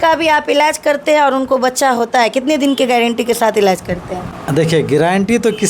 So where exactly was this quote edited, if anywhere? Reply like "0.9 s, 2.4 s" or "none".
none